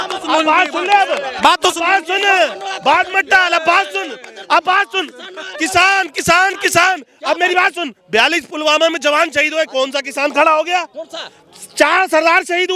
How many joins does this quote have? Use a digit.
0